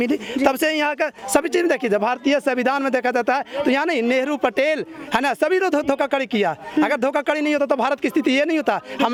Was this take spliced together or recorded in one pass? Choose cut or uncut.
uncut